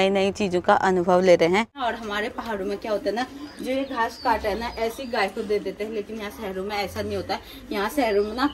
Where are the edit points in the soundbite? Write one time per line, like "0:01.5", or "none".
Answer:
0:01.8